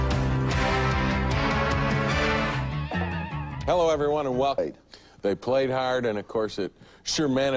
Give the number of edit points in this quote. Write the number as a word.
zero